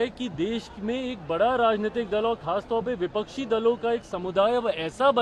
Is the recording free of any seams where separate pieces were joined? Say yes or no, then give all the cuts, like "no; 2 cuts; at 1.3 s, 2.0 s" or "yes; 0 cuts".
yes; 0 cuts